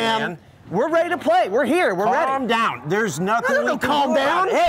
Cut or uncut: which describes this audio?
uncut